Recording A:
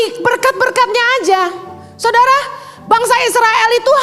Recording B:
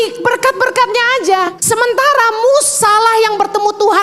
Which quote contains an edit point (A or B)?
B